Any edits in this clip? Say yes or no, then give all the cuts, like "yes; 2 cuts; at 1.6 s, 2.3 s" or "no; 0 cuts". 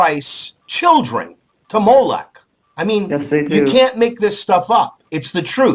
no; 0 cuts